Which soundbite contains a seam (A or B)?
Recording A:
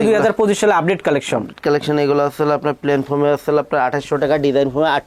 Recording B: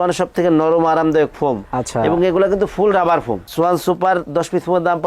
B